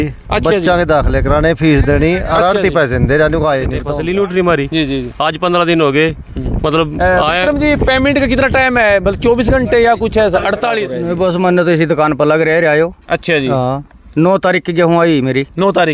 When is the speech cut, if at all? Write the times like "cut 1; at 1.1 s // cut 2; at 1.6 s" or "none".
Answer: cut 1; at 3.8 s // cut 2; at 11.0 s